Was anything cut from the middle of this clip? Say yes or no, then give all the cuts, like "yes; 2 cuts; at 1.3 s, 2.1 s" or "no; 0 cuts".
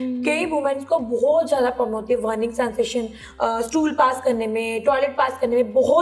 no; 0 cuts